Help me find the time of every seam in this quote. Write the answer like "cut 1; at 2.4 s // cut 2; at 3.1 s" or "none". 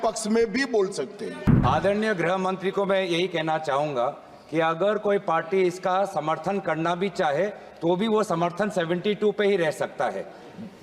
cut 1; at 1.5 s

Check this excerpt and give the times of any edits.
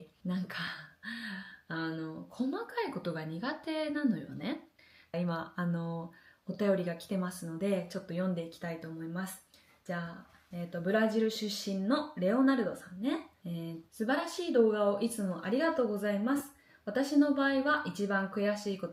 cut 1; at 4.9 s // cut 2; at 13.8 s

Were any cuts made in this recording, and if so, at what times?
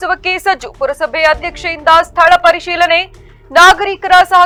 none

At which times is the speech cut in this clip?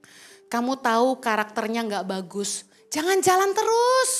none

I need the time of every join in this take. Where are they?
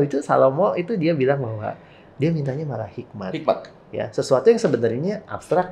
none

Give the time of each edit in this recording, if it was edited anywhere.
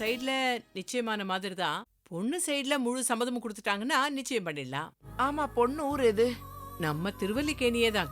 cut 1; at 5.1 s

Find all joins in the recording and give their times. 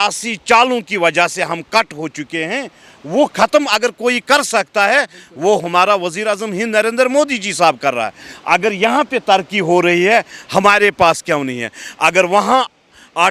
none

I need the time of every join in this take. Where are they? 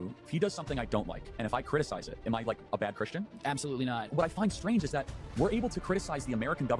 none

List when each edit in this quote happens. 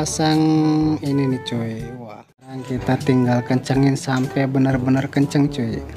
cut 1; at 2.6 s

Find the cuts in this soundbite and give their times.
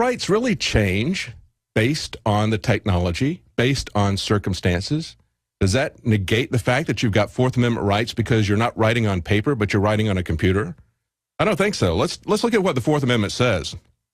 none

